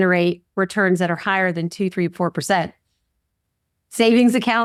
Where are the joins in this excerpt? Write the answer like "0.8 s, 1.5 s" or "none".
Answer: none